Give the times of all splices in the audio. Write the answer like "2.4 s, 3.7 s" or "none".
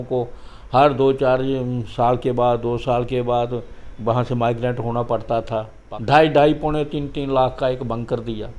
5.8 s